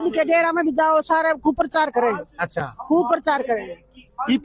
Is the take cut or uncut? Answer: uncut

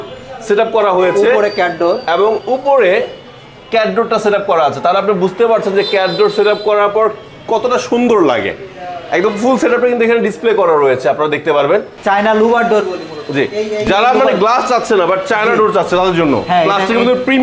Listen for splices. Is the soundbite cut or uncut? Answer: cut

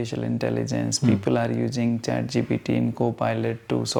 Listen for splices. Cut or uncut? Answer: uncut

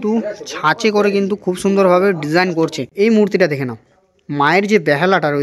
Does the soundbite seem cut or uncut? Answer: cut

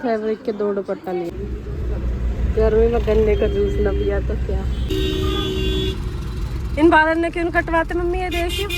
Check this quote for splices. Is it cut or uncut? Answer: cut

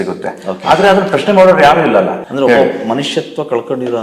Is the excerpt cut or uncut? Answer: cut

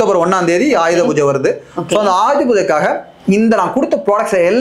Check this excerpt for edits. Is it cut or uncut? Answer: uncut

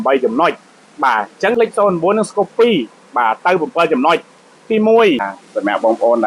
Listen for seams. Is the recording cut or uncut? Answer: cut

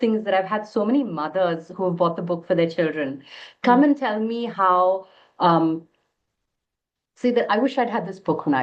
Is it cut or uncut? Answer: uncut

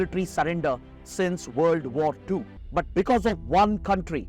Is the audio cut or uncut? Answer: cut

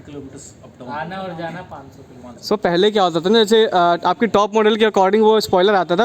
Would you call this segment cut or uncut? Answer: cut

